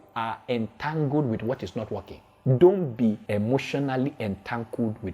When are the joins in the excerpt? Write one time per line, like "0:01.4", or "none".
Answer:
0:03.2